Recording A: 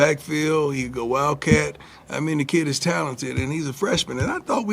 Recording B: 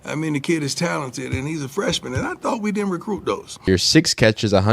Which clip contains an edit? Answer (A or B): B